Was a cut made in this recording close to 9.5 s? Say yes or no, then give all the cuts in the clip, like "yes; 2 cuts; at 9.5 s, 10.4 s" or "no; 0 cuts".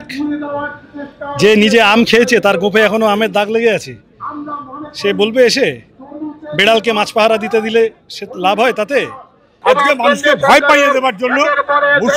yes; 1 cut; at 9.5 s